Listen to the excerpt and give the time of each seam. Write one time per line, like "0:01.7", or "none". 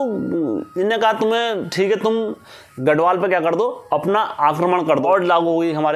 0:05.0